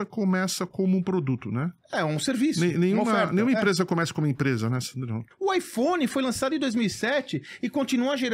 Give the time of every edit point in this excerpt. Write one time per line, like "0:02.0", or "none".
0:05.3